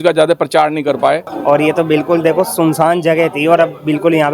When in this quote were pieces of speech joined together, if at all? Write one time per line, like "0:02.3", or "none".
0:01.3